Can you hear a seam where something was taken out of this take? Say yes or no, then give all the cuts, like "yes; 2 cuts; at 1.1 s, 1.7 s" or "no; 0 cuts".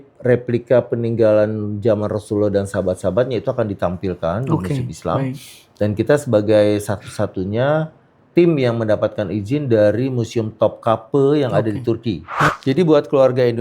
yes; 1 cut; at 12.3 s